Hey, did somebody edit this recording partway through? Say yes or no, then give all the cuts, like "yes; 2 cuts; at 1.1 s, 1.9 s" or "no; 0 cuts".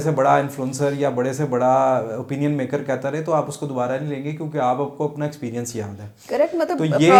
no; 0 cuts